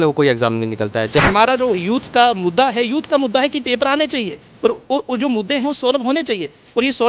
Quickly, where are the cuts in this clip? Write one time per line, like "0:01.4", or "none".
0:01.3